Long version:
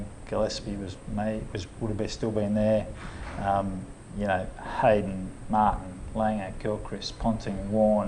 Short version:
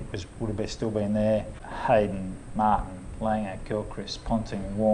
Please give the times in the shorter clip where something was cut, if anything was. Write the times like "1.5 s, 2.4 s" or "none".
1.6 s